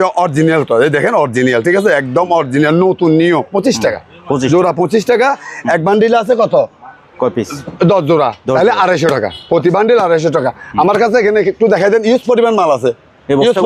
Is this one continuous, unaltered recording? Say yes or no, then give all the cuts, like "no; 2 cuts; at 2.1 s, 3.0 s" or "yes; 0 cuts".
yes; 0 cuts